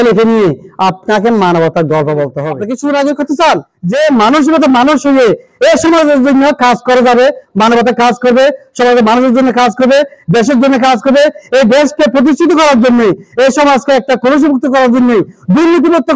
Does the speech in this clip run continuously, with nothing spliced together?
no; 2 cuts; at 2.5 s, 3.8 s

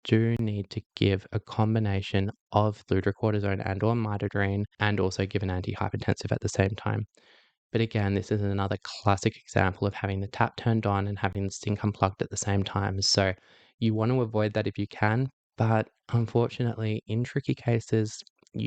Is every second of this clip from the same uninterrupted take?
no; 2 cuts; at 2.8 s, 4.7 s

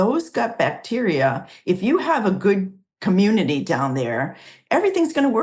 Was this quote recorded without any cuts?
yes; 0 cuts

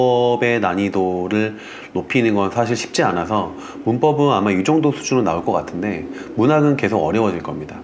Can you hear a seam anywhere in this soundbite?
no; 0 cuts

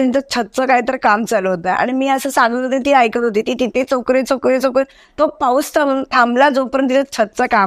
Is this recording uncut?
yes; 0 cuts

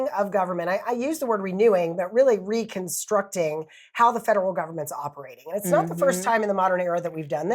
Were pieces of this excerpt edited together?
no; 0 cuts

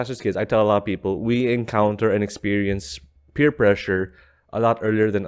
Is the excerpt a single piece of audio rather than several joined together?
yes; 0 cuts

